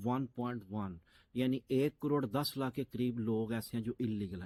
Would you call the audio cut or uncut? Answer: uncut